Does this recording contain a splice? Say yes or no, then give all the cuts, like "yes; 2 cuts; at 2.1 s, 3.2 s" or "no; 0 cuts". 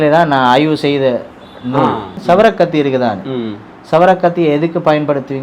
yes; 1 cut; at 2.1 s